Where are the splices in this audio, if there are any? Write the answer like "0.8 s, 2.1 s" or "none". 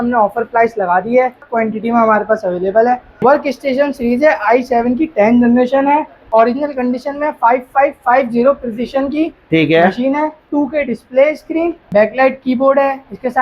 1.4 s, 3.2 s, 6.2 s, 10.4 s, 11.8 s